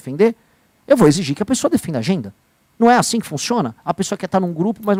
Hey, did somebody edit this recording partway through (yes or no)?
no